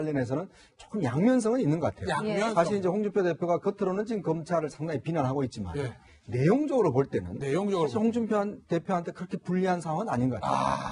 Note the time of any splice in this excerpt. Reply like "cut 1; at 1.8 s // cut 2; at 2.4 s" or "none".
cut 1; at 8.7 s

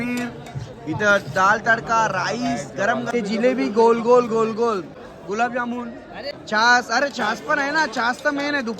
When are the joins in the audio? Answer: cut 1; at 3.1 s // cut 2; at 5.0 s // cut 3; at 6.3 s

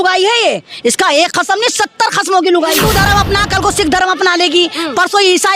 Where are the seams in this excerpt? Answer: cut 1; at 2.8 s

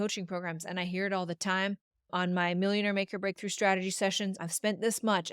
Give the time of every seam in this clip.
cut 1; at 2.1 s

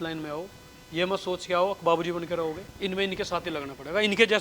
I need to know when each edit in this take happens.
cut 1; at 2.7 s

